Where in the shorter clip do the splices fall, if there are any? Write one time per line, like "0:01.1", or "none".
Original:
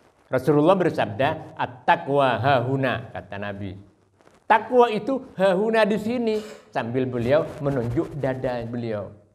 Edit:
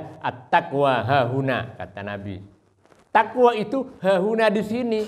none